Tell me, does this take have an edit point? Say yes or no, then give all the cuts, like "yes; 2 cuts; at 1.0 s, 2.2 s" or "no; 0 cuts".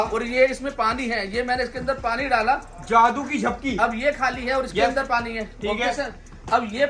no; 0 cuts